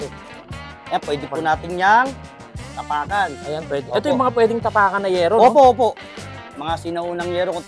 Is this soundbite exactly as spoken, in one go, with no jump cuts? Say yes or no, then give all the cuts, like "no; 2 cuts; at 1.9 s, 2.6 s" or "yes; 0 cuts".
yes; 0 cuts